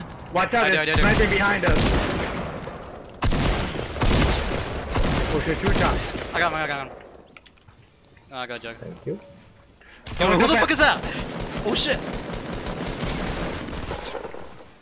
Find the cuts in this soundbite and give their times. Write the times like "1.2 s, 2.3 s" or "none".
7.6 s